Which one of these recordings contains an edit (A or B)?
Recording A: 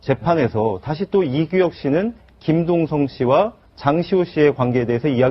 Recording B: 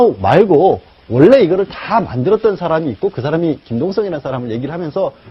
A